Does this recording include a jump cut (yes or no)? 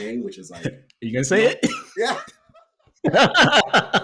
no